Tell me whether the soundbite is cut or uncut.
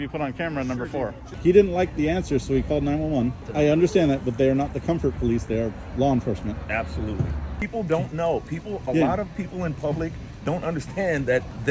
cut